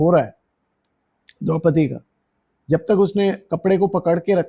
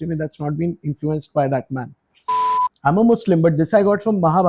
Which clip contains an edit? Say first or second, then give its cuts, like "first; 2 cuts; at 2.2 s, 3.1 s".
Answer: second; 1 cut; at 2.4 s